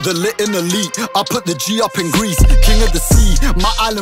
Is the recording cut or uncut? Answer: uncut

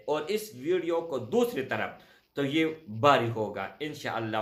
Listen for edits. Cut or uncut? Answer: uncut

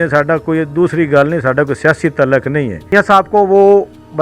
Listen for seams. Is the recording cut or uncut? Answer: cut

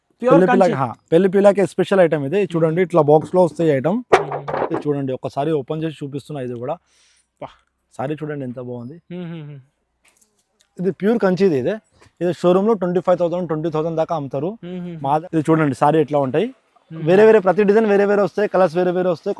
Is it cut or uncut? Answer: cut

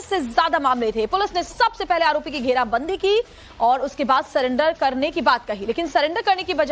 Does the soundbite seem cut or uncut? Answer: cut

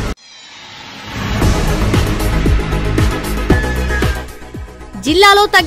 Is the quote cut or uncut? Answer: cut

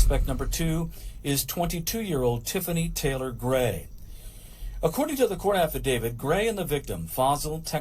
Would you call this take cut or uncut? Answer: uncut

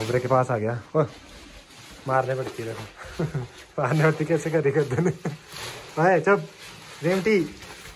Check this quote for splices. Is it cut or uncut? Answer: uncut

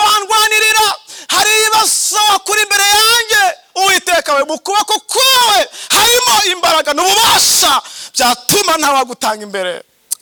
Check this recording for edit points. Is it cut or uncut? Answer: uncut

